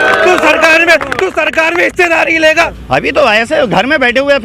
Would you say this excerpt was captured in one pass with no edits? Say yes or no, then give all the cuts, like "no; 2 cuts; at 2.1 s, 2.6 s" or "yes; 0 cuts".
no; 1 cut; at 2.5 s